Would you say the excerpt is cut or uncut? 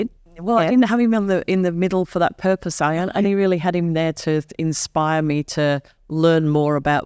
uncut